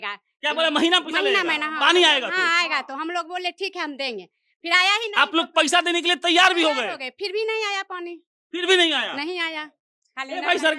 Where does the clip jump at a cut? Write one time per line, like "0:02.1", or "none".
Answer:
none